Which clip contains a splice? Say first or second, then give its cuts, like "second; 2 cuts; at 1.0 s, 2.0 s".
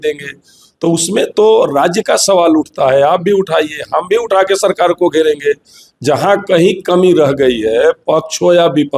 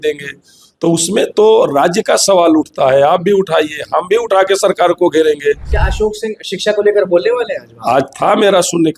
second; 1 cut; at 5.8 s